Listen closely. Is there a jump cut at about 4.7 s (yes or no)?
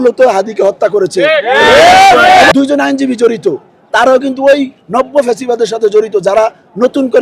no